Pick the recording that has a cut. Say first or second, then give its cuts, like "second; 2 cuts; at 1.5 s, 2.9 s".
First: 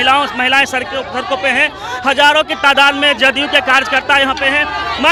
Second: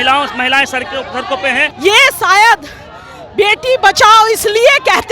second; 1 cut; at 1.7 s